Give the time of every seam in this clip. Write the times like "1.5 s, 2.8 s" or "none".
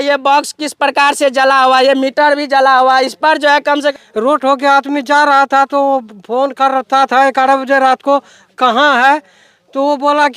3.9 s